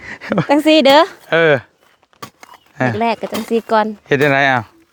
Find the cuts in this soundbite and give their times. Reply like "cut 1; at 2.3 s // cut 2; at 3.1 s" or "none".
none